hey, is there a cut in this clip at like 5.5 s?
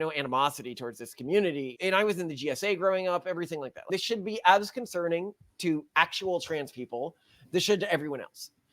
no; 2 cuts; at 1.7 s, 3.8 s

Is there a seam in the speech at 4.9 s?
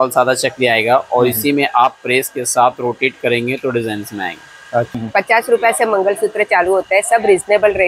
yes; 1 cut; at 4.9 s

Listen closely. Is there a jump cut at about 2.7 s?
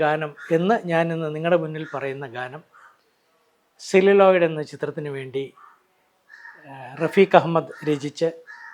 no; 0 cuts

